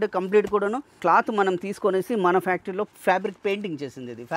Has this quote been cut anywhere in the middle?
yes; 1 cut; at 1.0 s

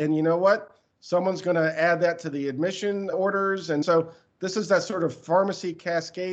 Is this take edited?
yes; 1 cut; at 3.8 s

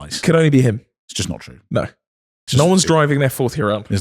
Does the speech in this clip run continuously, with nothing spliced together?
yes; 0 cuts

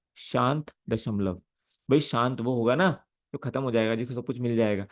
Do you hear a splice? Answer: no; 0 cuts

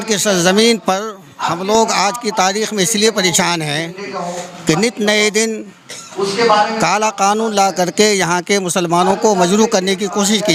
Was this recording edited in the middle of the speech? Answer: no; 0 cuts

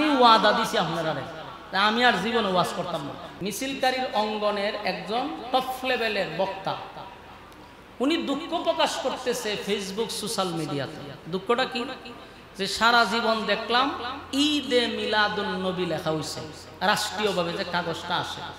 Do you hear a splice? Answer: yes; 1 cut; at 3.2 s

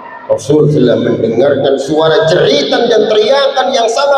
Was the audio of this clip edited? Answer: no; 0 cuts

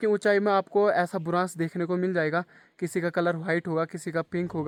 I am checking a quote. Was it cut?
no; 0 cuts

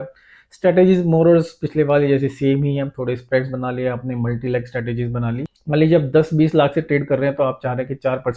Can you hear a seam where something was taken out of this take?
yes; 1 cut; at 5.5 s

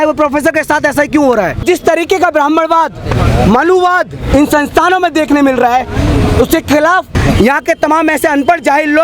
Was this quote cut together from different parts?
yes; 2 cuts; at 1.6 s, 7.1 s

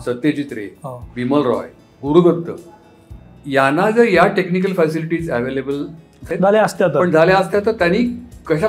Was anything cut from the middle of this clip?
yes; 1 cut; at 6.3 s

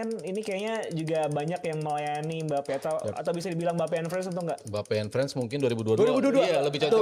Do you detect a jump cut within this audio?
no; 0 cuts

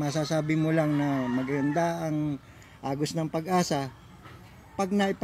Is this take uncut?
yes; 0 cuts

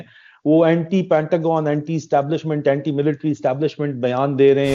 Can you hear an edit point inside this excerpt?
no; 0 cuts

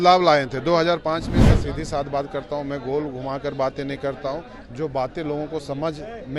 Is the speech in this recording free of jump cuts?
no; 1 cut; at 1.4 s

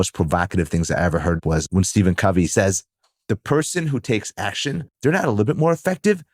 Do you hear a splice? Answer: yes; 3 cuts; at 1.4 s, 2.5 s, 4.9 s

